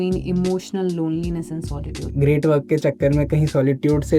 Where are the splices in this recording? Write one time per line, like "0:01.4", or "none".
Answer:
0:02.0